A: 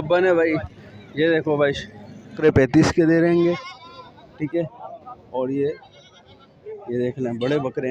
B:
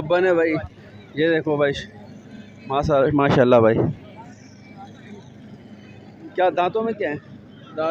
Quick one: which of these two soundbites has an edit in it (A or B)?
A